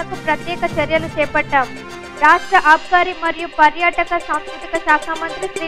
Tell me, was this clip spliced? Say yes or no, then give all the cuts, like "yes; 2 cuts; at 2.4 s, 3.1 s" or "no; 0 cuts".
no; 0 cuts